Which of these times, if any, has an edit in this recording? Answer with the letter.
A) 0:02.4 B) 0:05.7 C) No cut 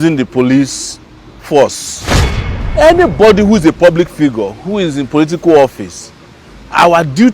A